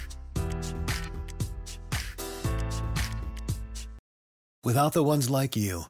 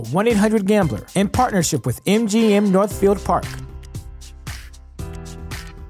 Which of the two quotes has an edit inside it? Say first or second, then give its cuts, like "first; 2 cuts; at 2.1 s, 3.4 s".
first; 1 cut; at 4.0 s